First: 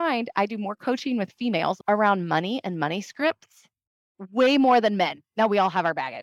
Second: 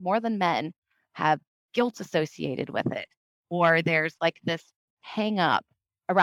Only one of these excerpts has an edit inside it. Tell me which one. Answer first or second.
first